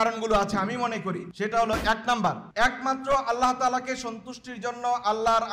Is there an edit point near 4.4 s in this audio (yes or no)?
no